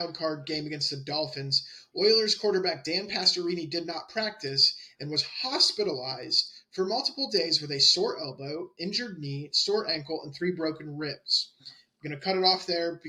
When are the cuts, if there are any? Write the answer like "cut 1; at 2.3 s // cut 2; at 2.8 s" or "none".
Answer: none

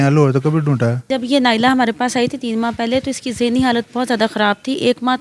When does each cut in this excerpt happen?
cut 1; at 1.1 s

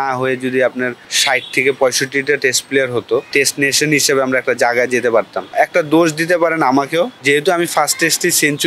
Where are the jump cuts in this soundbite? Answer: cut 1; at 1.1 s // cut 2; at 3.3 s // cut 3; at 5.4 s // cut 4; at 7.2 s

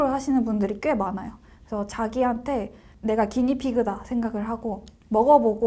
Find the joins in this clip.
cut 1; at 2.8 s

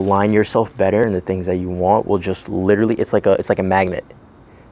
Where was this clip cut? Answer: cut 1; at 1.0 s

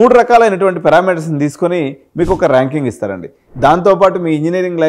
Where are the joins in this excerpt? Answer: cut 1; at 3.4 s

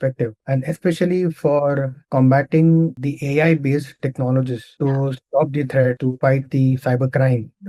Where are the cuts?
none

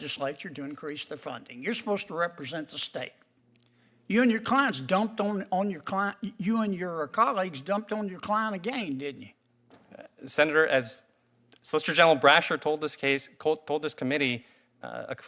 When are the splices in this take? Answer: none

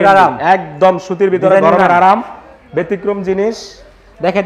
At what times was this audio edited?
none

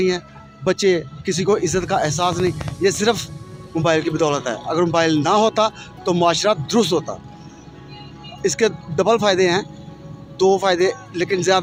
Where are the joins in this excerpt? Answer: none

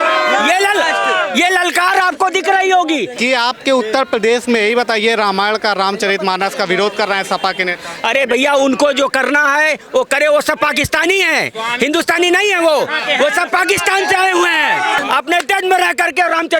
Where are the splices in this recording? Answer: cut 1; at 3.1 s // cut 2; at 15.0 s

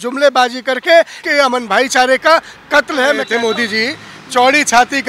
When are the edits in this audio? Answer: cut 1; at 1.2 s // cut 2; at 3.3 s

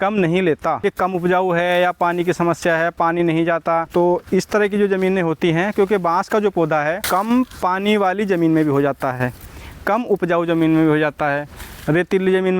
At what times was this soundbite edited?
cut 1; at 0.8 s // cut 2; at 3.9 s // cut 3; at 7.0 s

